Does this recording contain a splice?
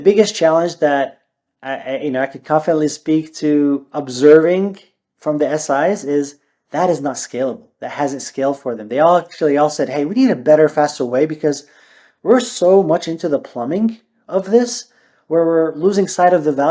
no; 0 cuts

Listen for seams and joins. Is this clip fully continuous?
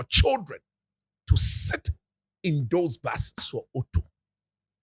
no; 1 cut; at 3.4 s

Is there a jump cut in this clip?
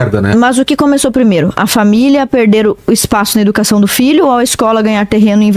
no; 0 cuts

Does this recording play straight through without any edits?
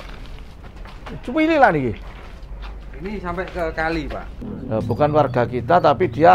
no; 1 cut; at 4.4 s

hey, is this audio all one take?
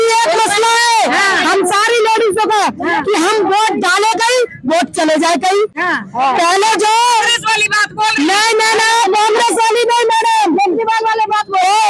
yes; 0 cuts

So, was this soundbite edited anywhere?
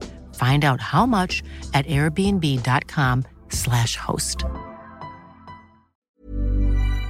yes; 1 cut; at 6.1 s

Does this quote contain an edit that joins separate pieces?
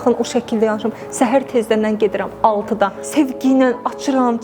yes; 1 cut; at 3.0 s

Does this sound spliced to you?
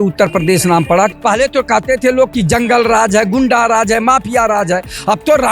yes; 1 cut; at 1.1 s

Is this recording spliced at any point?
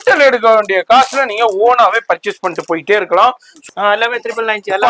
yes; 1 cut; at 3.6 s

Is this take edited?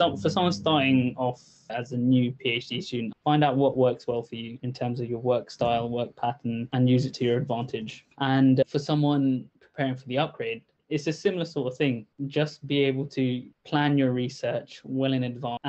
yes; 1 cut; at 3.2 s

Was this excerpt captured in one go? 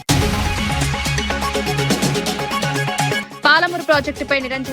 no; 2 cuts; at 1.4 s, 2.8 s

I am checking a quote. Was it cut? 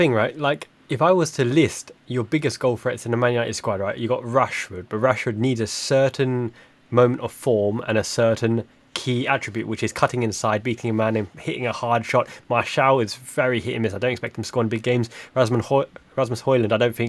no; 0 cuts

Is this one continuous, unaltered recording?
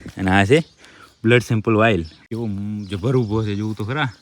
no; 1 cut; at 2.2 s

